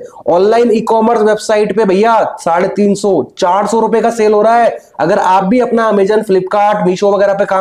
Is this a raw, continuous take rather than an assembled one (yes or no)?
yes